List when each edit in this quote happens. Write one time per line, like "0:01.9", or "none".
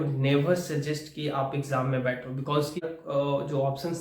0:02.8